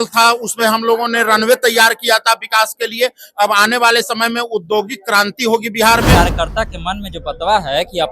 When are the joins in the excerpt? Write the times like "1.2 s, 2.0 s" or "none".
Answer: 6.1 s